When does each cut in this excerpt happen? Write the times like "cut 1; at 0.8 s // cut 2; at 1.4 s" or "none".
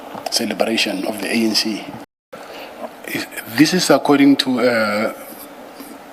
cut 1; at 2.2 s